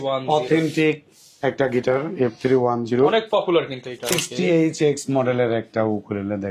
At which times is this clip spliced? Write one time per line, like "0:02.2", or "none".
0:04.2